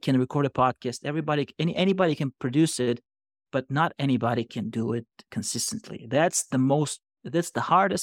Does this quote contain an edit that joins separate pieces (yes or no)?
no